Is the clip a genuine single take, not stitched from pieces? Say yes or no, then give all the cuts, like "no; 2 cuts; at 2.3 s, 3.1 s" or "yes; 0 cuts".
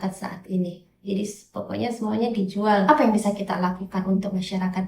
no; 1 cut; at 2.9 s